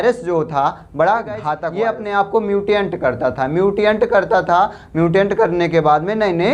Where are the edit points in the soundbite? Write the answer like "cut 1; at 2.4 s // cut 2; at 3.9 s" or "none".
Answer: cut 1; at 1.6 s